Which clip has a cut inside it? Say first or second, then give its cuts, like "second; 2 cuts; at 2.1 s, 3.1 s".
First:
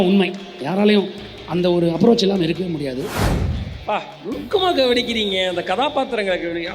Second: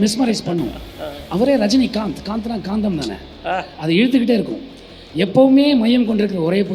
first; 1 cut; at 3.3 s